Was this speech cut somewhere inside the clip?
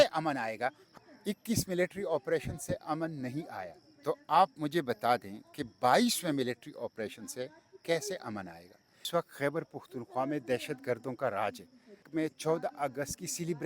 yes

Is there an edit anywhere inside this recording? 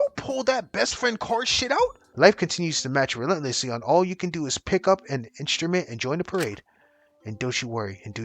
yes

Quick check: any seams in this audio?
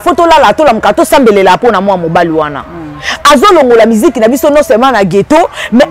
no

